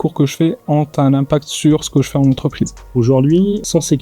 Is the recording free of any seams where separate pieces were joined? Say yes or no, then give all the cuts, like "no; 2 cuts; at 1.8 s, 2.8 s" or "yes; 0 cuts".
no; 1 cut; at 2.8 s